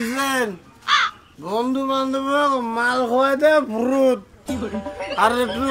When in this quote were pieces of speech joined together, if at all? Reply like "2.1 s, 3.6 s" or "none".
none